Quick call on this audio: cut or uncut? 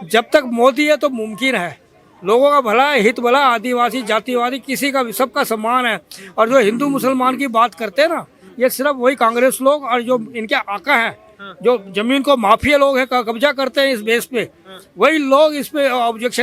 uncut